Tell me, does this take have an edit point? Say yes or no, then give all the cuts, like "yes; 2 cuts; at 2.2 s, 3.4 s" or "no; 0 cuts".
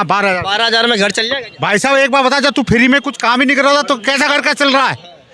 no; 0 cuts